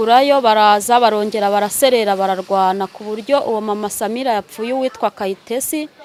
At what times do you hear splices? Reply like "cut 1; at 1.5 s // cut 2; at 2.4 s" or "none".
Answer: none